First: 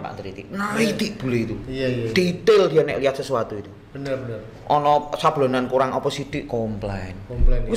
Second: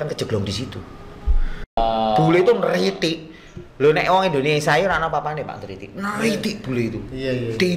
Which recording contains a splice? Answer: second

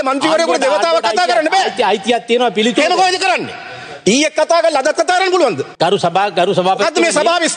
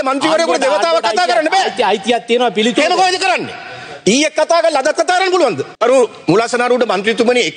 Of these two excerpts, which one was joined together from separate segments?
second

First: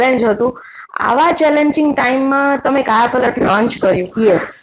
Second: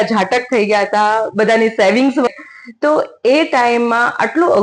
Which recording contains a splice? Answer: second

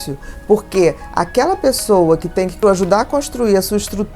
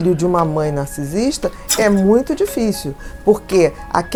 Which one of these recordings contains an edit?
first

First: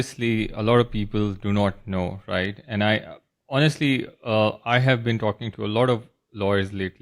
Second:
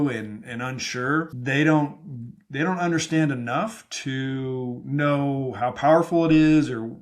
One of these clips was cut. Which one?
second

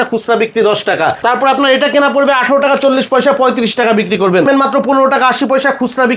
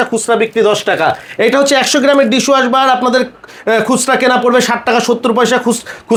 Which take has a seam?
first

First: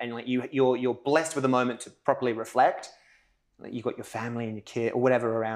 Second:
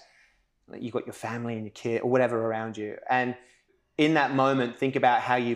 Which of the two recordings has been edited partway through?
second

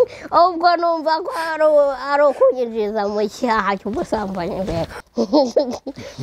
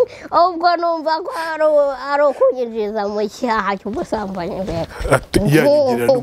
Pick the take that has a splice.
first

